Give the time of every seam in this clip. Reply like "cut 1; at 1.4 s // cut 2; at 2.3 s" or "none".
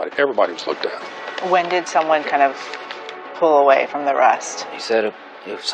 cut 1; at 4.6 s

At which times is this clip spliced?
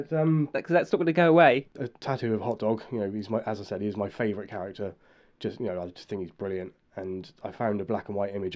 cut 1; at 1.7 s

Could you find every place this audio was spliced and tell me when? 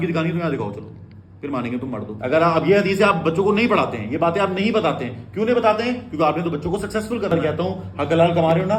cut 1; at 2.2 s // cut 2; at 7.3 s

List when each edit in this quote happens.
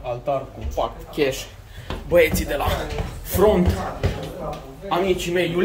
none

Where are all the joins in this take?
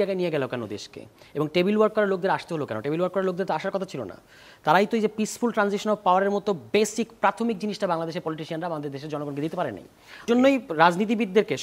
cut 1; at 10.3 s

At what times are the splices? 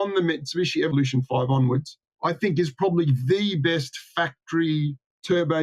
cut 1; at 0.9 s

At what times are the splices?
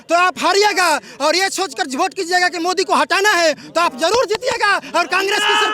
none

